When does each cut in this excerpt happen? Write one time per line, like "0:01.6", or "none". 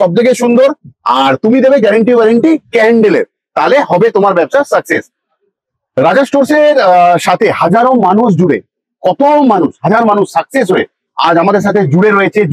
none